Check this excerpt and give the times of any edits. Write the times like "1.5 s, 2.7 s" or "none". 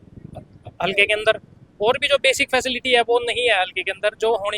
none